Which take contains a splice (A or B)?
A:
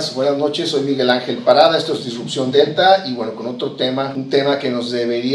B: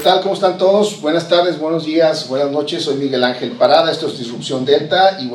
A